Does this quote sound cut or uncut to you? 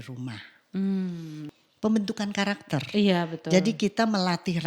cut